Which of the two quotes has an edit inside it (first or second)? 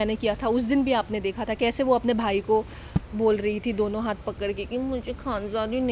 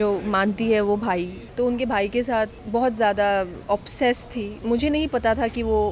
second